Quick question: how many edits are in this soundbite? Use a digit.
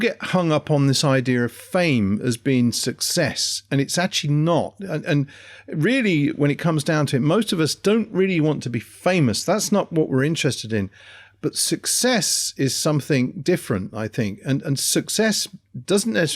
0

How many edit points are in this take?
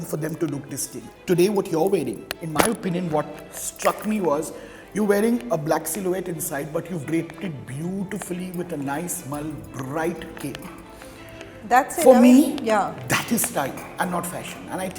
1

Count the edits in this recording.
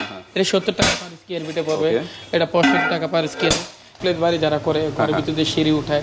1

